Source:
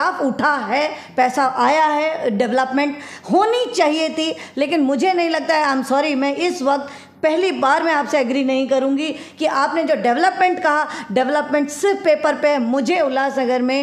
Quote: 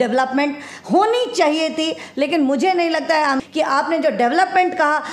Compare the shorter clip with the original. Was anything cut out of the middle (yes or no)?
yes